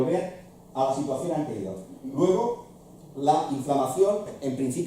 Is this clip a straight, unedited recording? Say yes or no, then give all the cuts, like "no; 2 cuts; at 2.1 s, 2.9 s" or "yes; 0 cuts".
no; 1 cut; at 3.0 s